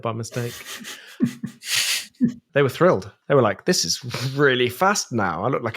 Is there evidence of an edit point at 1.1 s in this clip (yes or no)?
no